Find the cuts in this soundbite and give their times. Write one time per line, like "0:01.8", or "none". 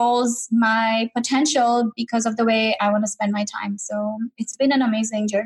none